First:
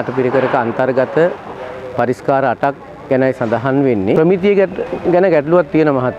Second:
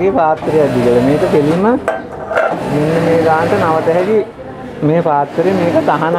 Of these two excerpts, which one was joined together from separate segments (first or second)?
first